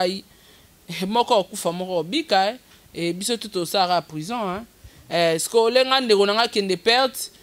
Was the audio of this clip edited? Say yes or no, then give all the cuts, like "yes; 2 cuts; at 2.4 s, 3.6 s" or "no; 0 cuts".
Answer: no; 0 cuts